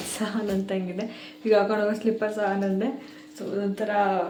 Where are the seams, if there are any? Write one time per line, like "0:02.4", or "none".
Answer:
none